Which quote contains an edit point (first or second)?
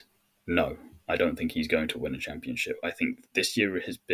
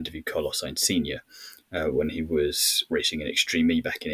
second